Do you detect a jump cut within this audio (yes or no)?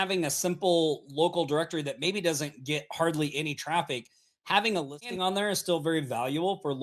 no